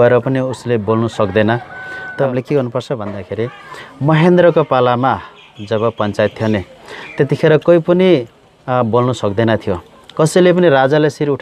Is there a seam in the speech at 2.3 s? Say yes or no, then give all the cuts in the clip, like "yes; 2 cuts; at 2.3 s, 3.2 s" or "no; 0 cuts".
yes; 1 cut; at 2.3 s